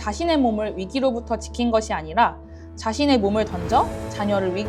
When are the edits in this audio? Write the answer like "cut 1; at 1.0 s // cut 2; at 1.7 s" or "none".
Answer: none